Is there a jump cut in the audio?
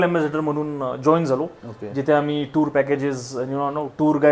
no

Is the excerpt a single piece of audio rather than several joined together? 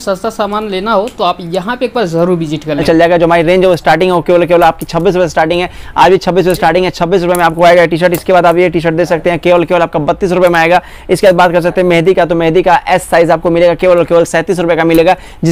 no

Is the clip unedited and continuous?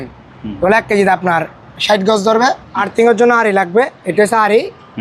no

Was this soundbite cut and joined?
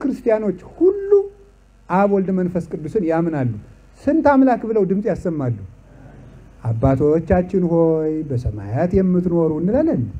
no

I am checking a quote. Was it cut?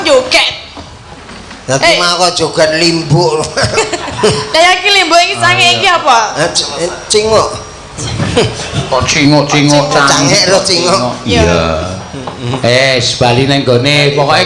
no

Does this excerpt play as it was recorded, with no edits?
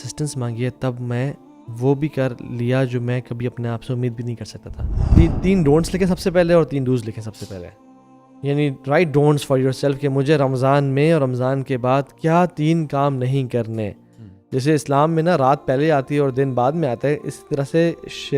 no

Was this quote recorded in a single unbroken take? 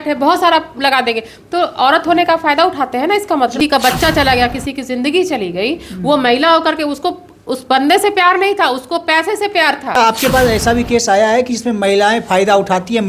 no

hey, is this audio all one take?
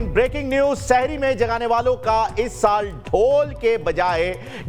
yes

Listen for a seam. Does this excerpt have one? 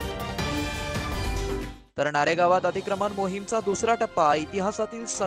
yes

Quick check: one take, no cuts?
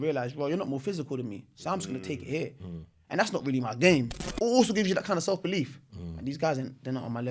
no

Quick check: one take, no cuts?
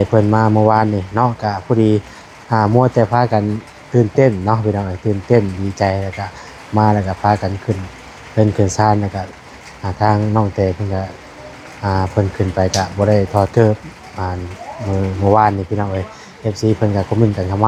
yes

